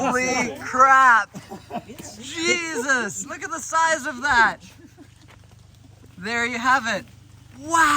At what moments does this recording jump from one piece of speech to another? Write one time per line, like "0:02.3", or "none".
none

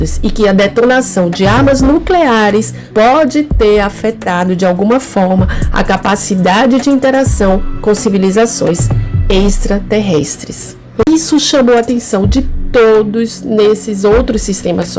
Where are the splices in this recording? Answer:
0:02.8
0:11.1

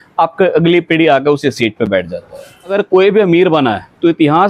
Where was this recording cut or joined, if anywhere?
0:02.7

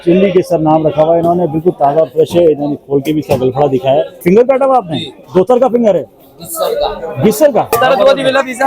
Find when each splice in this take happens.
0:04.2
0:07.7

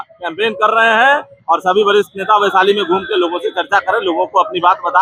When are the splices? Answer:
none

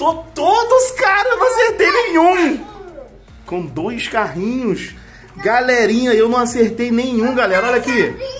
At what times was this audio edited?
none

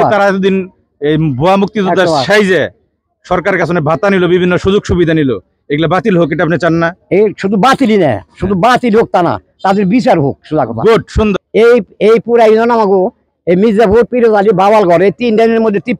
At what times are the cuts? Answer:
0:11.4

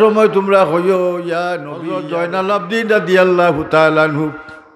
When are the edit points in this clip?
0:01.7

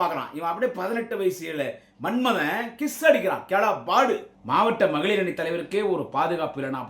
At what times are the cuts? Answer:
0:04.3

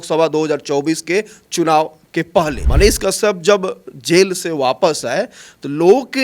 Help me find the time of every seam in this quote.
0:02.6

